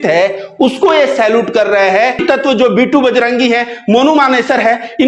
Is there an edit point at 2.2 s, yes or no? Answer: yes